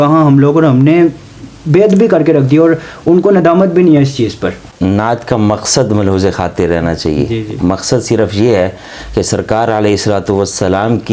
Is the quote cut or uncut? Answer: cut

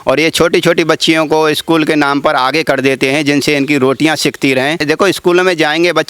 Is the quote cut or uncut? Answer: cut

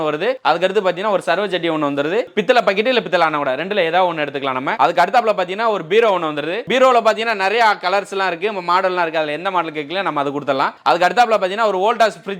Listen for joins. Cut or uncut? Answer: uncut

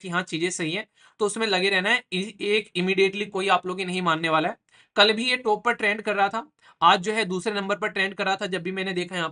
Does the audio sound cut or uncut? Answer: uncut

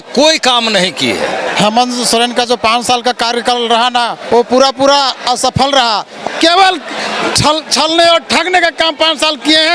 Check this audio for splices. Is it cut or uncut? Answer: cut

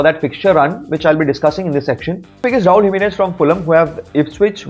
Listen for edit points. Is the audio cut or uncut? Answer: cut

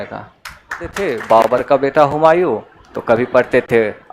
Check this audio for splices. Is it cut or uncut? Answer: cut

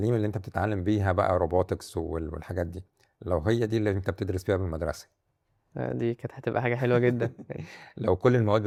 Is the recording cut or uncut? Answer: uncut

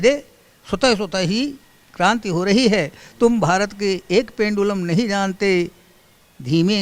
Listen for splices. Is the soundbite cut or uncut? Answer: uncut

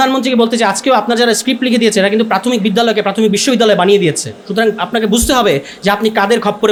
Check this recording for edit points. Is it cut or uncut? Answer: uncut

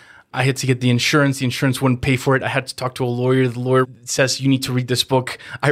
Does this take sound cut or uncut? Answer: cut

